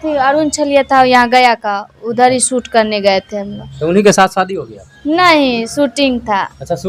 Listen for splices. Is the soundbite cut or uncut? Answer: uncut